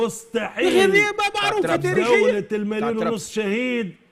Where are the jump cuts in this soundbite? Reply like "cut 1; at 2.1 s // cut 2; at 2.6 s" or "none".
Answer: none